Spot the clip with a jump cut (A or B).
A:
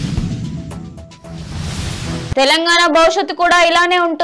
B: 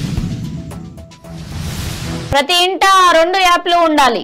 B